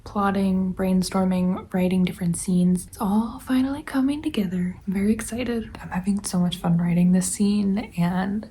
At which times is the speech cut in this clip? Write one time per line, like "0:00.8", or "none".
0:05.7